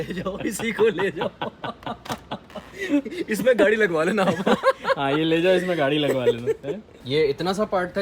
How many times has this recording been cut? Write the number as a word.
one